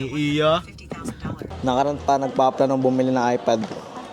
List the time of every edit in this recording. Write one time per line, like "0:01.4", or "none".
0:01.1